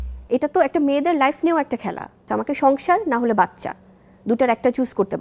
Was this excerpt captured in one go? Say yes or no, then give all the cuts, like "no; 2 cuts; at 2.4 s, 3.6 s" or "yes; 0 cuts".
no; 1 cut; at 2.2 s